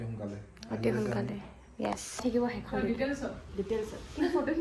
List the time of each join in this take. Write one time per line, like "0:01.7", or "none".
0:02.2